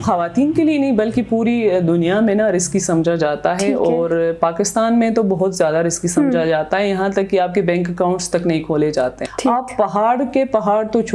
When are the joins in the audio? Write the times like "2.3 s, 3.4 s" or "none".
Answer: 9.2 s